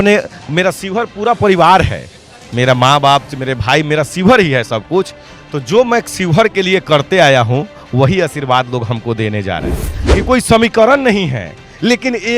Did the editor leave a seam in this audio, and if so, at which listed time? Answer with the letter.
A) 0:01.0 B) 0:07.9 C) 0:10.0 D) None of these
C